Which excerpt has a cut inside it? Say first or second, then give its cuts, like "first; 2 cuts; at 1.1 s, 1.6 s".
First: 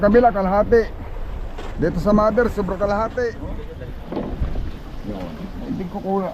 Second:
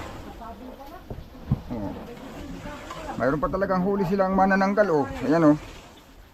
first; 1 cut; at 3.5 s